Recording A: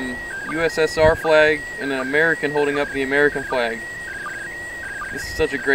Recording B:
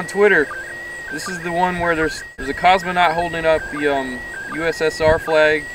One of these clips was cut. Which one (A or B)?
B